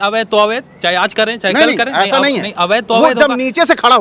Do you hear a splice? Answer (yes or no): no